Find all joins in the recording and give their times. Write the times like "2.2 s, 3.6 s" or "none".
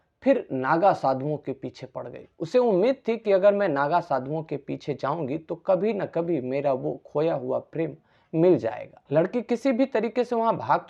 8.9 s